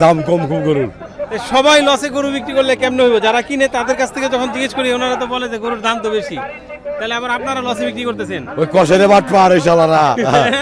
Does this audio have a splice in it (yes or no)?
no